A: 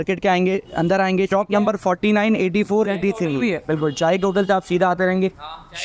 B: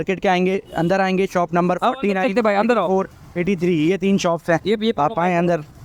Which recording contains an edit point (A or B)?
A